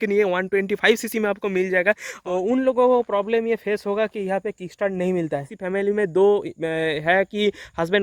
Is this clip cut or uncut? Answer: cut